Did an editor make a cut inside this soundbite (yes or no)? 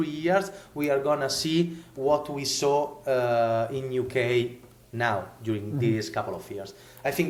no